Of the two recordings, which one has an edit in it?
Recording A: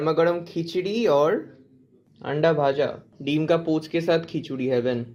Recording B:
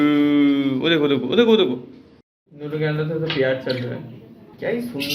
B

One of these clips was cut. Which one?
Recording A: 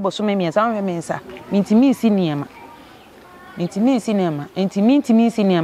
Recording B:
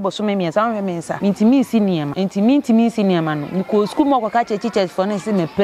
B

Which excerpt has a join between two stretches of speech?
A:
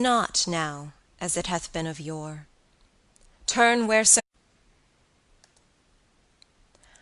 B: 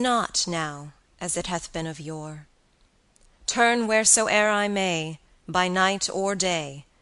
B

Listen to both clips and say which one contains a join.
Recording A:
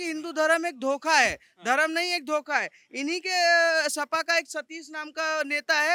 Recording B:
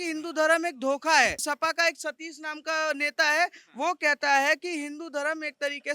B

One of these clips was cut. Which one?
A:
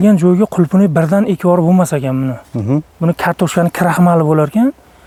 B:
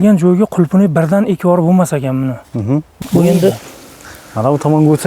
B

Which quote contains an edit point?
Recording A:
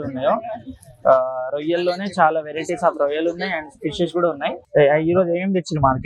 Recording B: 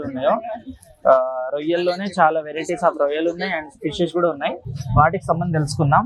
A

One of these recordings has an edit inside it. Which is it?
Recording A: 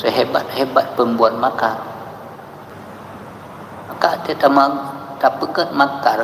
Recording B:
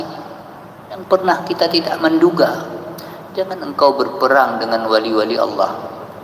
A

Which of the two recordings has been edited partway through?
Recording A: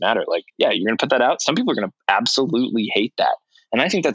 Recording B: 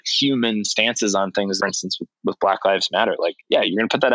B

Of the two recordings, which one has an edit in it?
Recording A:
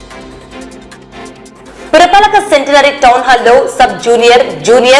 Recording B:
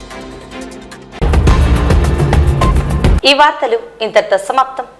A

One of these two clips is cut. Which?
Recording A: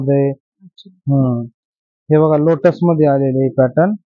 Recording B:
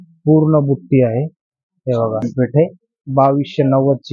B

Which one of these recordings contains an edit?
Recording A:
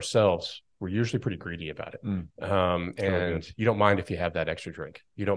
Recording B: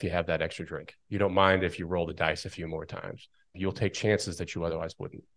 B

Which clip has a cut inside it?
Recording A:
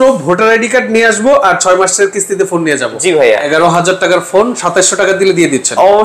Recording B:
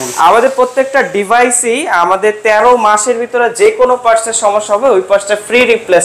A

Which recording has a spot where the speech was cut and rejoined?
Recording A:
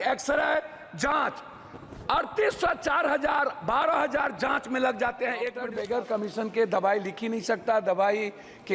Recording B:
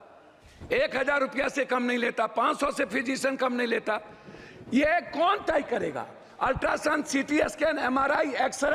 A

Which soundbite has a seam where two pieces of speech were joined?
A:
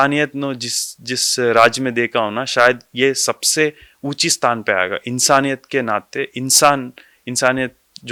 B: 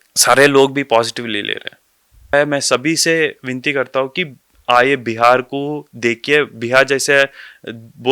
B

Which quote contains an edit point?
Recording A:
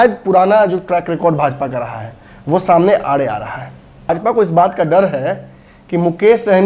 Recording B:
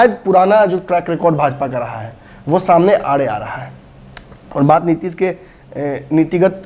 A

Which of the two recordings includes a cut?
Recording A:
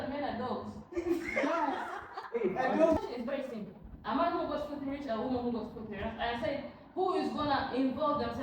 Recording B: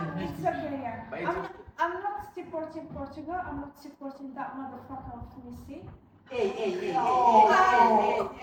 A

